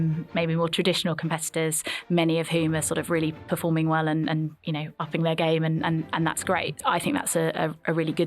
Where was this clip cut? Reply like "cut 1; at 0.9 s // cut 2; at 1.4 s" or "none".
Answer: cut 1; at 6.7 s